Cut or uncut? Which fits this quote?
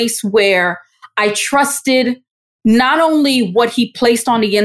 uncut